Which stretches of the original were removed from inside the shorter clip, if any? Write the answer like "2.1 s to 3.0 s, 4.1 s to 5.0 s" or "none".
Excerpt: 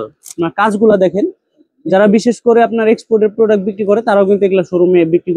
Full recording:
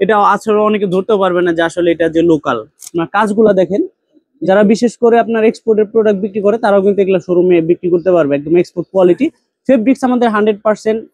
none